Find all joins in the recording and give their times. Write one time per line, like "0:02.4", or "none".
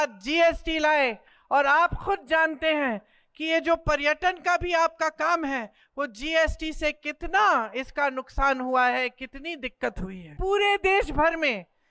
0:10.4